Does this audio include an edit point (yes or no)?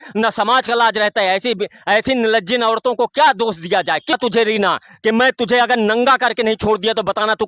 yes